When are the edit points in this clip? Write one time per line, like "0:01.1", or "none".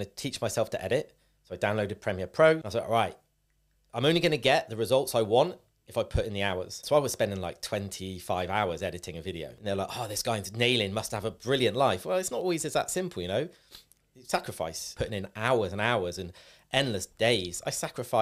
0:02.7
0:06.8
0:09.5
0:14.8